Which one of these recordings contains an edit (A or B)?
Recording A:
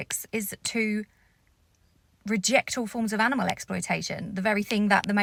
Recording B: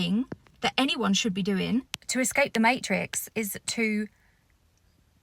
B